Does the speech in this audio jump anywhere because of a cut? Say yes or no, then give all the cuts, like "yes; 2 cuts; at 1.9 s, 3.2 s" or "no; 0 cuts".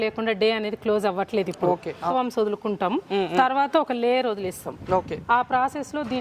yes; 1 cut; at 2.1 s